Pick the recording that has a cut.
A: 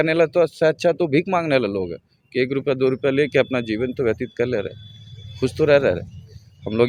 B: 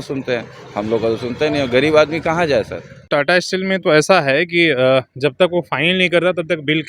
B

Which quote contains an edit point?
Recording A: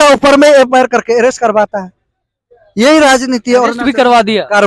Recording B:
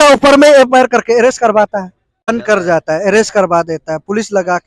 B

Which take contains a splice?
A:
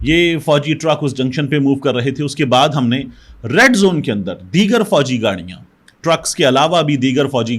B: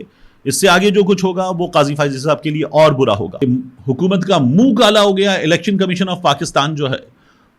B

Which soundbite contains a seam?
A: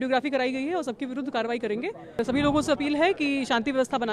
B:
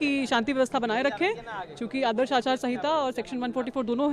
A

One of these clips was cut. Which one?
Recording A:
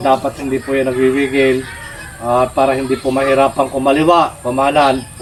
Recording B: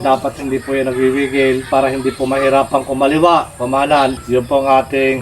B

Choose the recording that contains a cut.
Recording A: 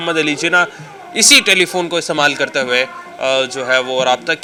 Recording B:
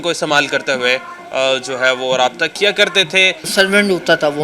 B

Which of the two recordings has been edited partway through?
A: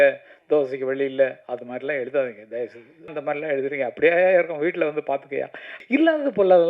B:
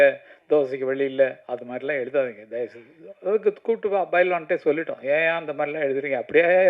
A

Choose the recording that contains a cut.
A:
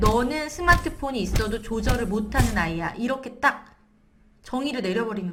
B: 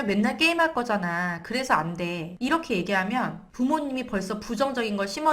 B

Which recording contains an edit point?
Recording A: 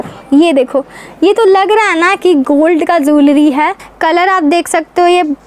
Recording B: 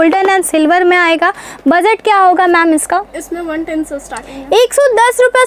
A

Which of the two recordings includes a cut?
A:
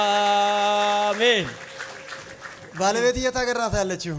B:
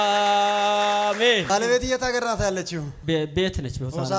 B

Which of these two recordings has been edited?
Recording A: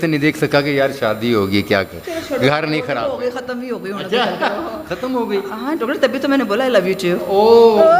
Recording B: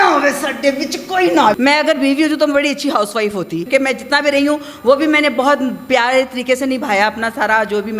B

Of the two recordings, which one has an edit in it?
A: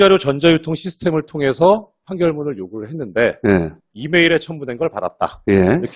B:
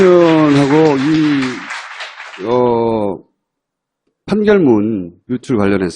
A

